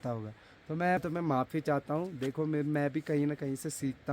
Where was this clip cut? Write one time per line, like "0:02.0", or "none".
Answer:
0:01.0